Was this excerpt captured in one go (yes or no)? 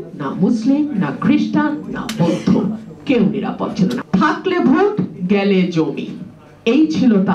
no